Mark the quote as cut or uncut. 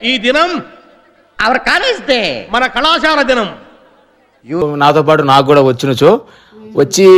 cut